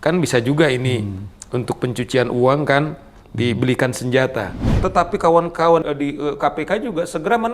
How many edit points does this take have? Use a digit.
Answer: 2